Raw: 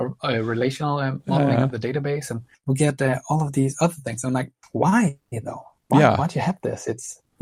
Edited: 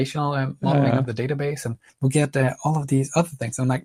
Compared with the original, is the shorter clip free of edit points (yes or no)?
yes